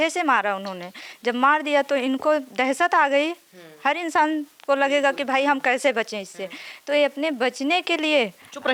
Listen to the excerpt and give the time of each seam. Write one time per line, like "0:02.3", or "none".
none